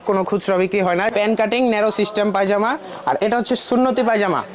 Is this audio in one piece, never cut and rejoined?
no; 1 cut; at 1.1 s

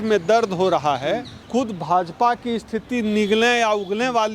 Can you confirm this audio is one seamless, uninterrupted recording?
no; 1 cut; at 1.3 s

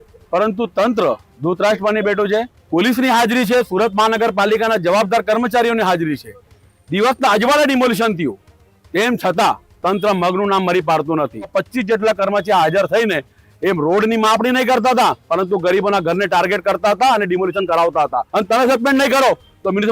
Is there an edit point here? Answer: yes; 3 cuts; at 2.6 s, 11.5 s, 18.2 s

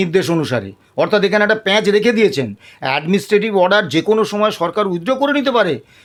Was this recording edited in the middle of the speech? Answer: no; 0 cuts

